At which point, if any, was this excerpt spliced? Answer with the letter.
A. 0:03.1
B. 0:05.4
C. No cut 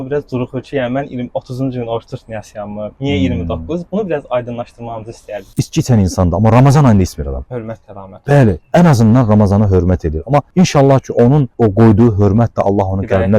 B